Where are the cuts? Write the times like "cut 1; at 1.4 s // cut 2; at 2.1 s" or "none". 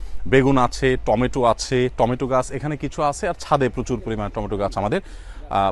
none